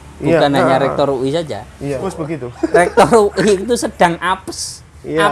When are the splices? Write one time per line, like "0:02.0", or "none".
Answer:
0:02.0